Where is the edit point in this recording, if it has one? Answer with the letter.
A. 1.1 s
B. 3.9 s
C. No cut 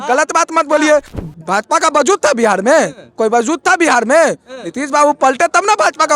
A